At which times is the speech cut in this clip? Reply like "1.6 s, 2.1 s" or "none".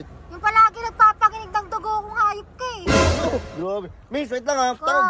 none